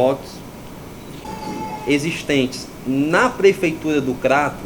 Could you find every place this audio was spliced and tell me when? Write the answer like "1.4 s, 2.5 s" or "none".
1.2 s